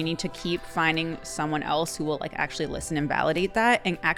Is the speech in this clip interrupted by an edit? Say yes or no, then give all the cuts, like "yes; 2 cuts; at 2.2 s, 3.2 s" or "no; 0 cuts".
no; 0 cuts